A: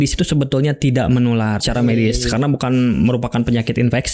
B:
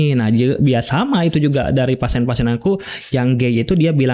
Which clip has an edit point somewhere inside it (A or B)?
A